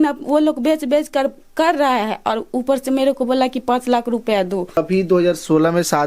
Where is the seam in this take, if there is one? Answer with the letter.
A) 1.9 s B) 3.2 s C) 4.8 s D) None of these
C